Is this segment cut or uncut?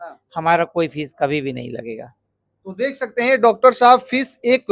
uncut